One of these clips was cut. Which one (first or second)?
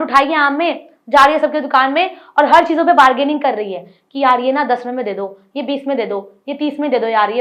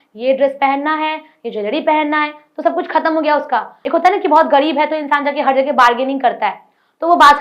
second